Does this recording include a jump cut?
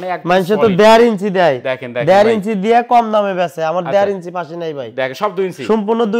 no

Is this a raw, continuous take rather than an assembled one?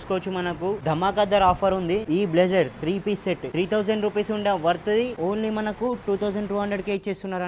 no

